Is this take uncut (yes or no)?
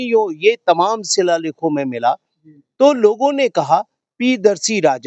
yes